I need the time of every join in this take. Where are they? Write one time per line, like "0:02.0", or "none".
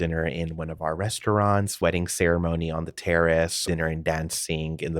0:01.7
0:03.6